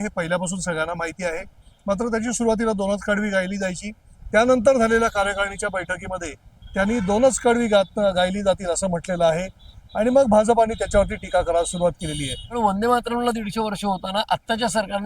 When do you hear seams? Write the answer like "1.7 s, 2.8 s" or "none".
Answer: 4.2 s, 12.6 s